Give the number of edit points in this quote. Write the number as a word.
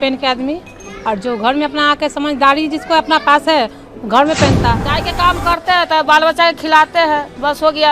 one